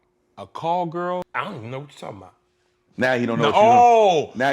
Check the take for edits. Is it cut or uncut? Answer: cut